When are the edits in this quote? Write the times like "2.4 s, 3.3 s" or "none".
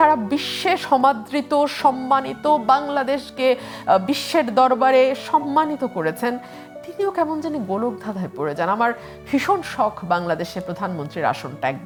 none